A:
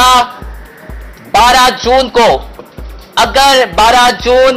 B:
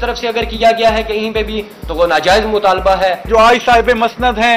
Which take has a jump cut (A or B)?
B